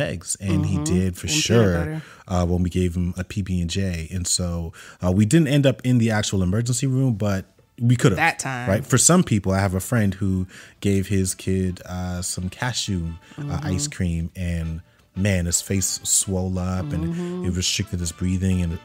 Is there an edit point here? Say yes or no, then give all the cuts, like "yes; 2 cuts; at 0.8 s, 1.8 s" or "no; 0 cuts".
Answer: yes; 1 cut; at 3.2 s